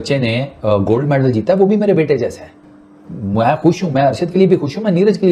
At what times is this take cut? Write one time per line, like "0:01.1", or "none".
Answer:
none